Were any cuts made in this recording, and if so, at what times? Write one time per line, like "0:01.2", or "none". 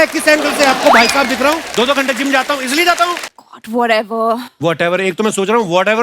0:03.3